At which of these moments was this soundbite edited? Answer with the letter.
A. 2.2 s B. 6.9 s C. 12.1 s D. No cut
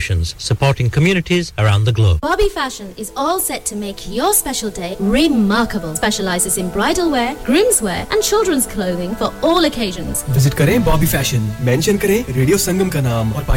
A